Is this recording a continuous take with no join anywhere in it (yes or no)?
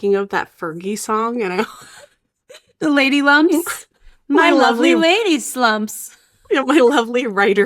no